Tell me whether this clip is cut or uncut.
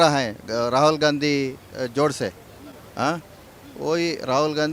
uncut